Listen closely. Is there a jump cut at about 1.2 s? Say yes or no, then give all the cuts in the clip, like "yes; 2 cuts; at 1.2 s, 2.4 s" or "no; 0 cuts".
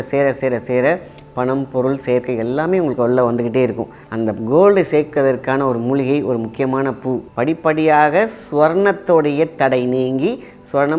no; 2 cuts; at 4.0 s, 7.3 s